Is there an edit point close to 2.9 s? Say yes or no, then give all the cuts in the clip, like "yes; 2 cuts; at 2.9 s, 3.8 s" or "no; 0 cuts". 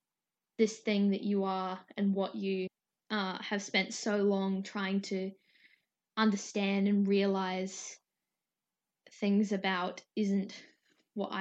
yes; 1 cut; at 2.9 s